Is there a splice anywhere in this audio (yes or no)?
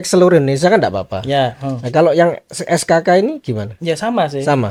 no